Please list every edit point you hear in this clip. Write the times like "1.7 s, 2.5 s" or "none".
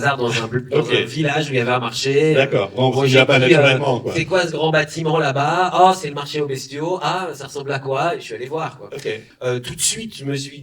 9.3 s